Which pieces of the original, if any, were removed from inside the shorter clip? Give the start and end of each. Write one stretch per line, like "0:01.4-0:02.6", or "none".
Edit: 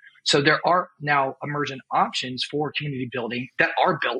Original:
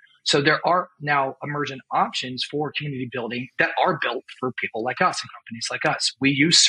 none

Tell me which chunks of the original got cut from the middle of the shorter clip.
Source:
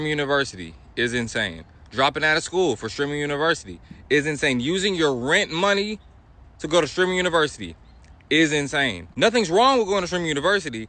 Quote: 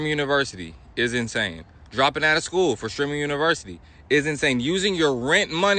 none

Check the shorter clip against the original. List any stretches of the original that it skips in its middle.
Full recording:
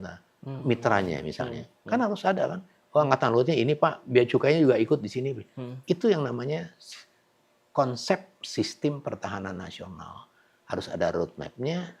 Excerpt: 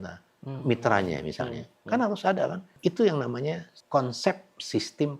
0:02.6-0:05.7
0:06.8-0:07.6

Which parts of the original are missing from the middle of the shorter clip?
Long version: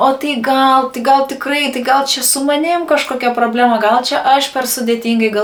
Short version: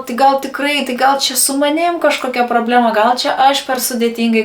none

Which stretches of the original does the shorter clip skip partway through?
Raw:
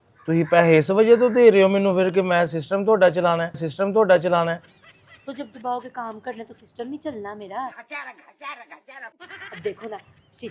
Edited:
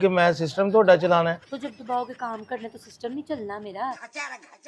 0:03.6-0:05.2

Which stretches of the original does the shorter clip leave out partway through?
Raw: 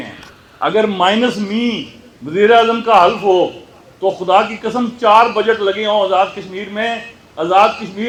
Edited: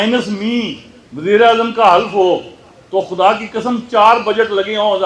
none

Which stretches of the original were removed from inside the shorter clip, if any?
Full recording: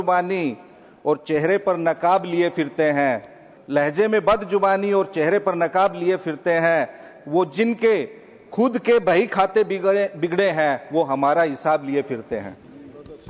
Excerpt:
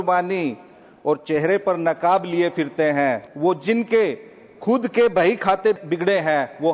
0:03.3-0:07.2
0:09.7-0:10.1

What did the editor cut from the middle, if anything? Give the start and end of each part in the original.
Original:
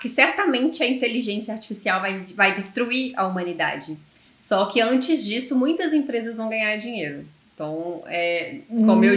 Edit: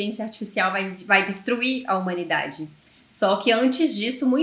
none

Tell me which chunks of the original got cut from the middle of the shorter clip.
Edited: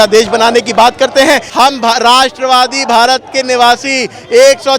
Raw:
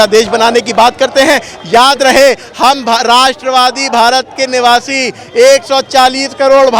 0:01.5-0:02.5

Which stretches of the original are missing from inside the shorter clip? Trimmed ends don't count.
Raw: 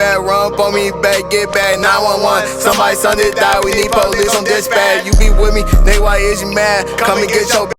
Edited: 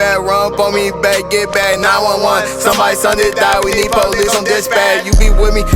none

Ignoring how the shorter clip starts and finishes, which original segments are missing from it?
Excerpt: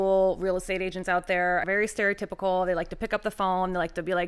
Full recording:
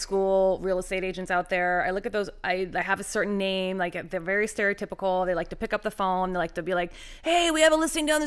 0:01.9-0:04.2

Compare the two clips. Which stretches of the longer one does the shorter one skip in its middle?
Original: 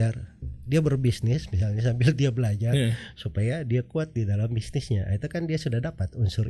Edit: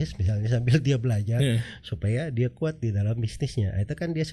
none

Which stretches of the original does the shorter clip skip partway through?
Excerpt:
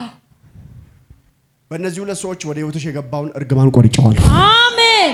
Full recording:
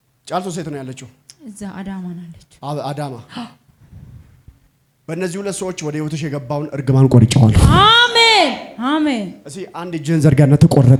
none

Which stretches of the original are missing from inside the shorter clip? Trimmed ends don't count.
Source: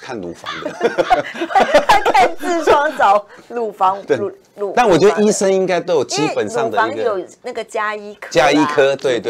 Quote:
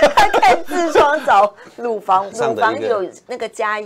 0:04.0-0:06.5

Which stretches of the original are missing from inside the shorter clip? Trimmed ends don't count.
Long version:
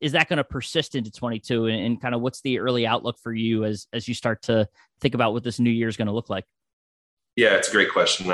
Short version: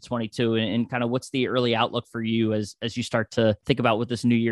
0:04.7-0:04.9

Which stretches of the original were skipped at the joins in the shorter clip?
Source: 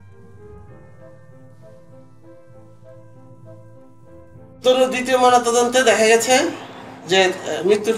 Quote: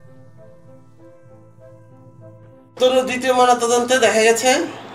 0:04.0-0:04.6

